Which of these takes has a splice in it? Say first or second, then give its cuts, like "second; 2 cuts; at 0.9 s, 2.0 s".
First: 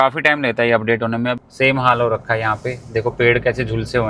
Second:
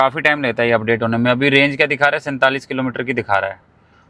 first; 1 cut; at 1.3 s